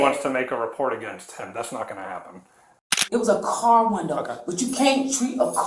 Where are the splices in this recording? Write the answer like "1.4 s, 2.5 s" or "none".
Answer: 2.8 s